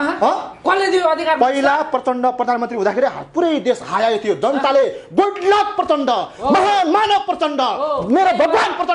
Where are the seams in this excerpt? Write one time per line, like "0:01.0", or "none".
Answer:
none